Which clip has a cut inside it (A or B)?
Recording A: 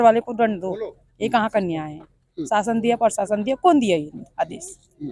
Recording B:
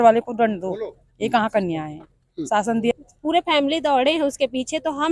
B